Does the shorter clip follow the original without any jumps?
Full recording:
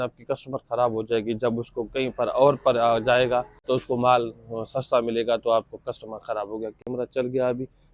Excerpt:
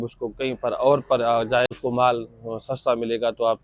no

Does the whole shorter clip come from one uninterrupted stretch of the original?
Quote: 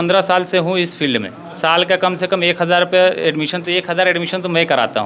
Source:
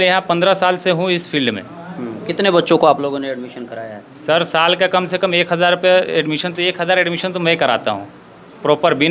no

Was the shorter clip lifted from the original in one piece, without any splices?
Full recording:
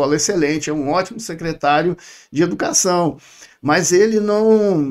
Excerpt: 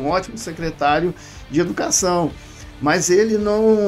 yes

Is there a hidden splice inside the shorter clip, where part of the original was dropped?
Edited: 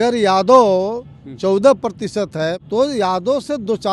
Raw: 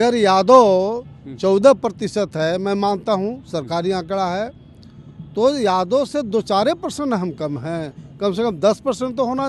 yes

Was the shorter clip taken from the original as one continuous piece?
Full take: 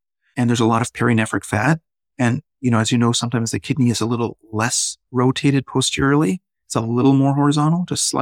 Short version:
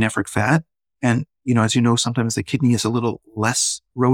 yes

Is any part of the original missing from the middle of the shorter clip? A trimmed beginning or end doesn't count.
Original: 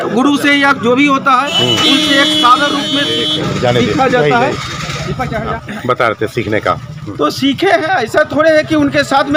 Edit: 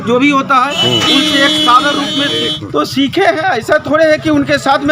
yes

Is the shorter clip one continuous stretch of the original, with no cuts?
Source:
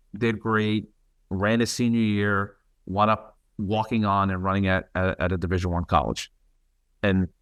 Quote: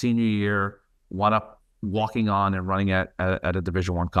yes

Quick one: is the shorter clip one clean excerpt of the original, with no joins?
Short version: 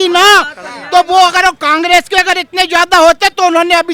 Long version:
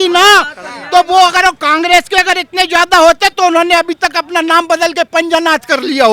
yes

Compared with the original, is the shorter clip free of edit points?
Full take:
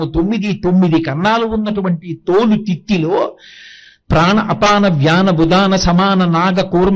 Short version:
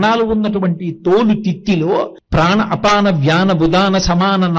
no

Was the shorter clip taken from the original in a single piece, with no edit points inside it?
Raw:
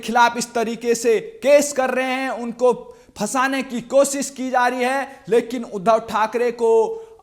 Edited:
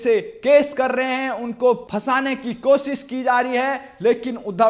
no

